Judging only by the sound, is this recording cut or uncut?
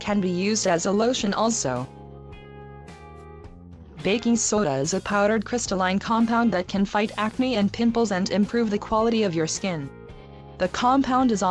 uncut